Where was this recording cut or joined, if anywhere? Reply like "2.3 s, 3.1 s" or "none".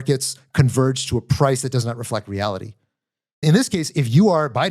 3.4 s